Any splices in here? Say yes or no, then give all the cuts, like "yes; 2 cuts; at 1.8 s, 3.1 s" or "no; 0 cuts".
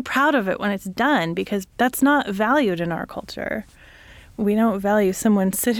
yes; 2 cuts; at 1.7 s, 4.3 s